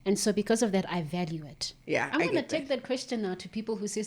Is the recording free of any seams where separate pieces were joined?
no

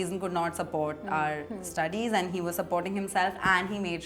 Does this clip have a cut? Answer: no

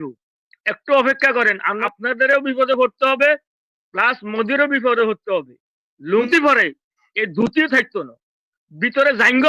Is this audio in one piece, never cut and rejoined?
no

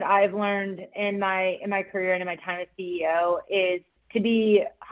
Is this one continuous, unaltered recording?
no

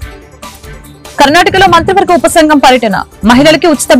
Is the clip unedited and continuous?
no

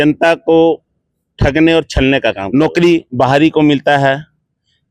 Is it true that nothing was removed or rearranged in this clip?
no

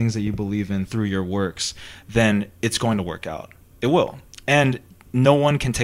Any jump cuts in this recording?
no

